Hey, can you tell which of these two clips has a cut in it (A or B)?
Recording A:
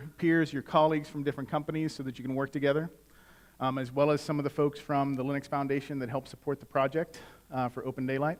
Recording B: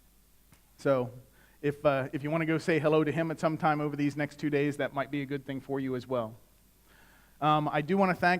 B